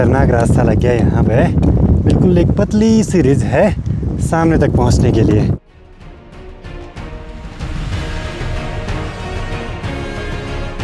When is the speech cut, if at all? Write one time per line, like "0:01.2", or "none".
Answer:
none